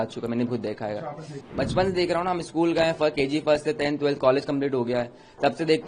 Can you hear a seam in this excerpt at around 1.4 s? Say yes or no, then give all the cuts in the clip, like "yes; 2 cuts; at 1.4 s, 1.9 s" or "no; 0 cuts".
yes; 1 cut; at 1.4 s